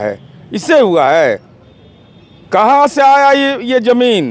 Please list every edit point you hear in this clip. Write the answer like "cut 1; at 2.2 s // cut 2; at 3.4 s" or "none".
none